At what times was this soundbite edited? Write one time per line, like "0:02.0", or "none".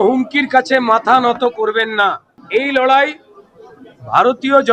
0:02.3